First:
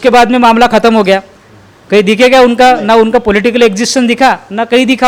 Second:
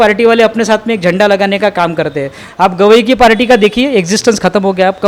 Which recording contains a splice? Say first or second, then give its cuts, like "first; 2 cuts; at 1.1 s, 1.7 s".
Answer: second; 1 cut; at 2.4 s